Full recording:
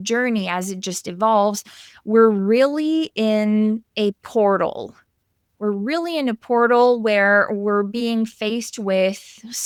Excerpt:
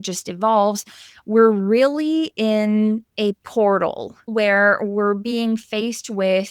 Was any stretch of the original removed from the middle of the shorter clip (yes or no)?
yes